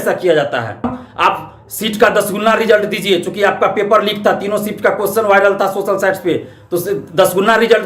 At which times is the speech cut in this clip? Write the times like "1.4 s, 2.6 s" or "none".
1.0 s